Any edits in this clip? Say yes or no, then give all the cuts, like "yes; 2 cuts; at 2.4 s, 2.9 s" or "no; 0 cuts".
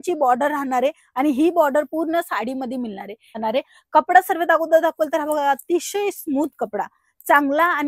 yes; 1 cut; at 3.4 s